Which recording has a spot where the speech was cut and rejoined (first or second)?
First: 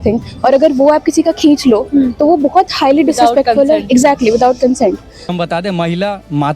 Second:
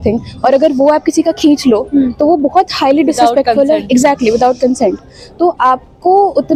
first